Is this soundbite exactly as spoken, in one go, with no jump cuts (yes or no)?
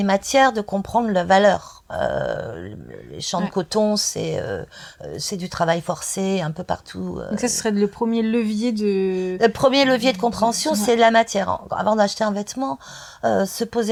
yes